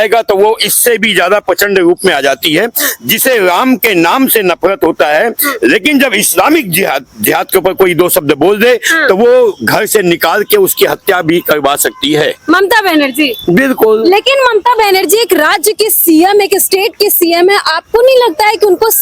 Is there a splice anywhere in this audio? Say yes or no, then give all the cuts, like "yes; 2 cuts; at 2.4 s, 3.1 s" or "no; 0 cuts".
no; 0 cuts